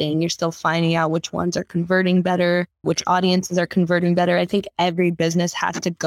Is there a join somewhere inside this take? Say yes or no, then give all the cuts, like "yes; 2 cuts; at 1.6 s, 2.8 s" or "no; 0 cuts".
yes; 1 cut; at 2.8 s